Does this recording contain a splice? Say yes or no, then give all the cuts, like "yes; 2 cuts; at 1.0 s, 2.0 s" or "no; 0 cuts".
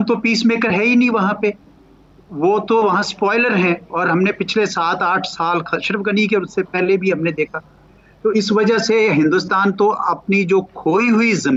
no; 0 cuts